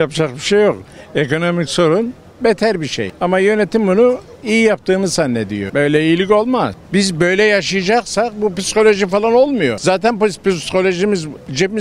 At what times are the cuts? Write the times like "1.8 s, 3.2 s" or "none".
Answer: 6.8 s